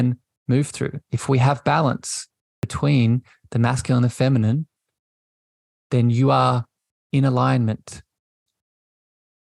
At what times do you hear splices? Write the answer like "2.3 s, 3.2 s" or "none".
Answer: 2.6 s